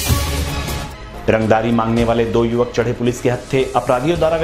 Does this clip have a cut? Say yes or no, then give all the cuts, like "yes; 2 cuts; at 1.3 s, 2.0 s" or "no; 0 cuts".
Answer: no; 0 cuts